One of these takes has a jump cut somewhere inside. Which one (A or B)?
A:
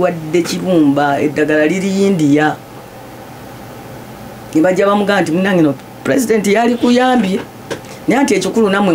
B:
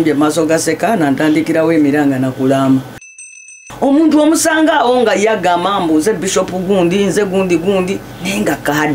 B